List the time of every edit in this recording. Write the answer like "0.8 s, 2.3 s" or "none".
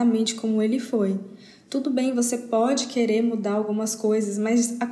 none